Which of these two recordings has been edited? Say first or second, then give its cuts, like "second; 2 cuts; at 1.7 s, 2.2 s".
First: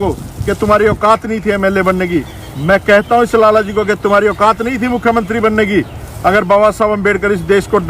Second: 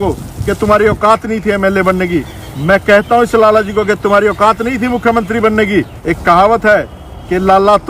second; 1 cut; at 6.0 s